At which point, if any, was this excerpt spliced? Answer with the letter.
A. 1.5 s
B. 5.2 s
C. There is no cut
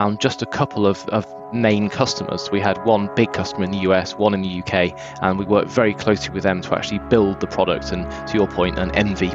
C